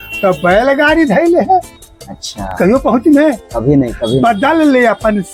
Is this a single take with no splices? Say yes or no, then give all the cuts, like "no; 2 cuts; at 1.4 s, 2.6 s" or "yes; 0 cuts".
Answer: yes; 0 cuts